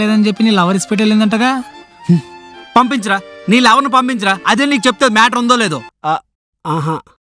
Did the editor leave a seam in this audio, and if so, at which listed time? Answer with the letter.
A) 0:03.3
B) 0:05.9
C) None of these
B